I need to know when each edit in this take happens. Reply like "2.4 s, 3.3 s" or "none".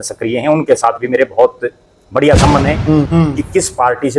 3.1 s